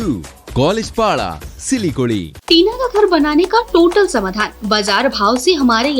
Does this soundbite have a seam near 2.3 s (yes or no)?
yes